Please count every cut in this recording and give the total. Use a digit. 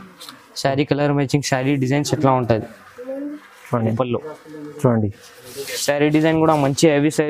1